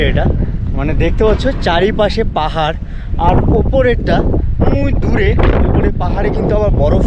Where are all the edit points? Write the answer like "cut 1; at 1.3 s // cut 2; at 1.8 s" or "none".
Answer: none